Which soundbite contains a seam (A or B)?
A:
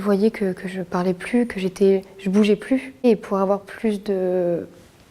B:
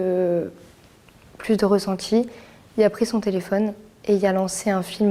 A